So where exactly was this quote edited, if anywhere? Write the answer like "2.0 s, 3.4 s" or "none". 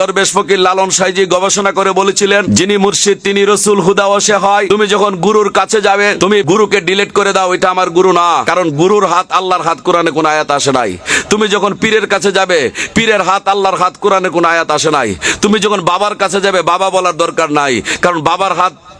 2.5 s, 4.7 s, 6.3 s, 8.5 s